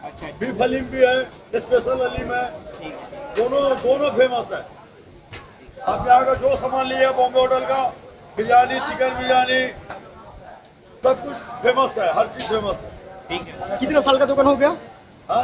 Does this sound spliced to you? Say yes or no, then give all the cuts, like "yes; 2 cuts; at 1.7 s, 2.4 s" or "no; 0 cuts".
no; 0 cuts